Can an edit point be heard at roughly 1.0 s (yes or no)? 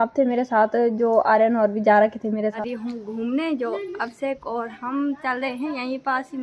no